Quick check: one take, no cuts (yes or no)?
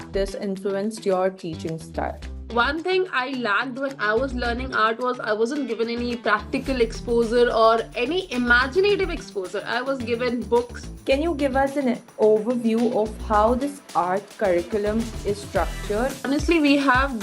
no